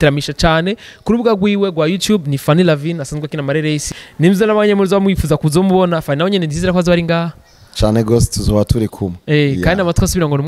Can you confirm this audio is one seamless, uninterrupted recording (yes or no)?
no